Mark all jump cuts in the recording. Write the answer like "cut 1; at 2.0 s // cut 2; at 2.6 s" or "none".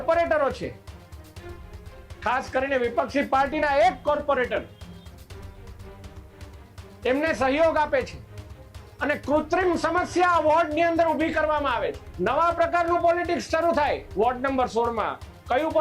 cut 1; at 12.0 s

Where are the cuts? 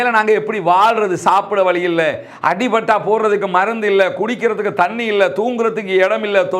none

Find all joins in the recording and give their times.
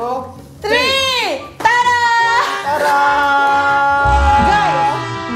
none

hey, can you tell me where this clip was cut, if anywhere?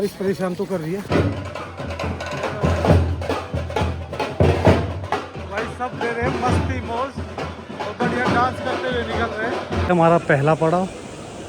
cut 1; at 1.0 s // cut 2; at 9.8 s

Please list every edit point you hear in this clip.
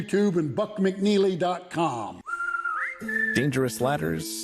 cut 1; at 2.3 s

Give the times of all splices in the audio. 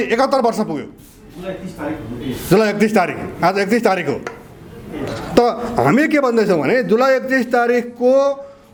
none

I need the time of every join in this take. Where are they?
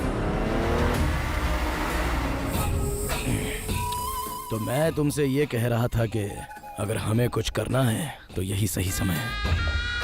cut 1; at 2.4 s

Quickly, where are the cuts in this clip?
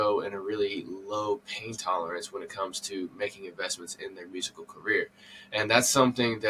none

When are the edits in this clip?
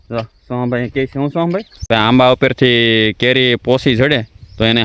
cut 1; at 1.7 s

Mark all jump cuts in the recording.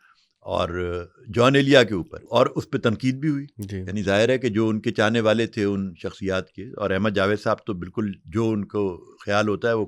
cut 1; at 2.2 s

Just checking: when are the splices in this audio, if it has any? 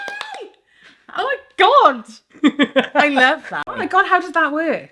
cut 1; at 3.7 s

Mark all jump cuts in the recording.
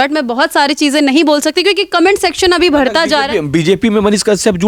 none

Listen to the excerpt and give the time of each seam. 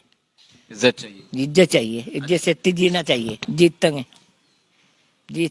cut 1; at 3.4 s

